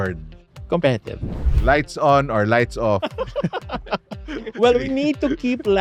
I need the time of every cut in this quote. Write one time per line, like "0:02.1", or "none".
none